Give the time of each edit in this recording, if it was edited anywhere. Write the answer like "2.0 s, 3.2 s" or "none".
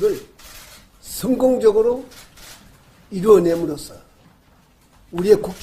none